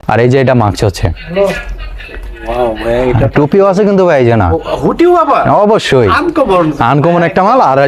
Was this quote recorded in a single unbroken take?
yes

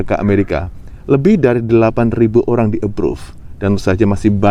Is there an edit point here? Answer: no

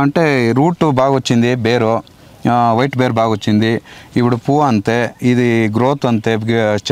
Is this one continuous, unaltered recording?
yes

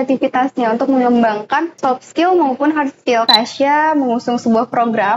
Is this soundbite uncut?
no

